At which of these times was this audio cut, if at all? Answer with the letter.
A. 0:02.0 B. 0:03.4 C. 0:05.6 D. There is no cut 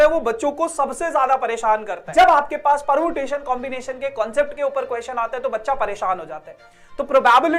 A